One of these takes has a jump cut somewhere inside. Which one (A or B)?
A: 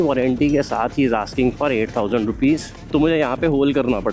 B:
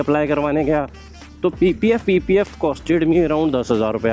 A